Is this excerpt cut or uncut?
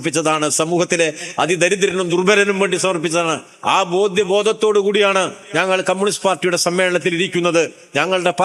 uncut